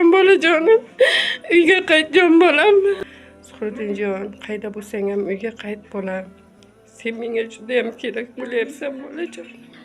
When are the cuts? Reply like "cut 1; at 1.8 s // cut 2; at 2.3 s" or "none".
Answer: cut 1; at 3.0 s